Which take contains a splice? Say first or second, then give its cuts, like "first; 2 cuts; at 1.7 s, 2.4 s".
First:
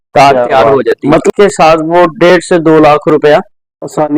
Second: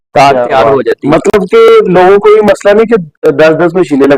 first; 1 cut; at 1.3 s